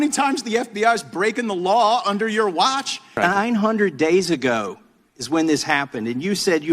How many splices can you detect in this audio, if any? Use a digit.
1